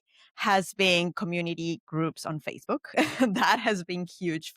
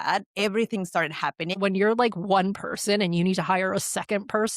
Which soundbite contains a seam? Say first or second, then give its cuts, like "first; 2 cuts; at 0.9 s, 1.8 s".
second; 1 cut; at 1.6 s